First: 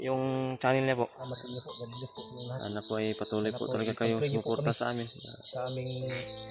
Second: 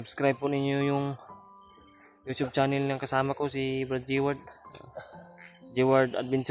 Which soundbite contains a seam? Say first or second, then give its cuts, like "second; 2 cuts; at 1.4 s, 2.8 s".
first; 1 cut; at 1.3 s